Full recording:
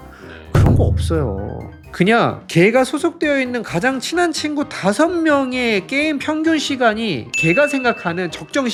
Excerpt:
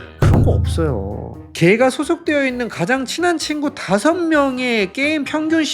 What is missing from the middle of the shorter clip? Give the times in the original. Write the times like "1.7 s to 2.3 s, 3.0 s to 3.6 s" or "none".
1.8 s to 2.4 s